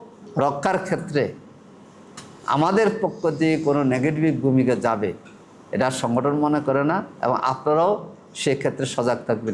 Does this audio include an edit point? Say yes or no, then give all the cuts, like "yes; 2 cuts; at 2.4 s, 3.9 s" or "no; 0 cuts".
no; 0 cuts